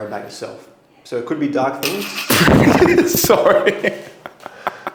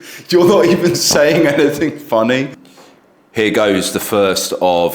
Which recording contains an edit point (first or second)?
second